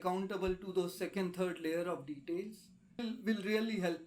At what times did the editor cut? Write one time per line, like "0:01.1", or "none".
none